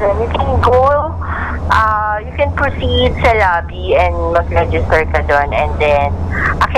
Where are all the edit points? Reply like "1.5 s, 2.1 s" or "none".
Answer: none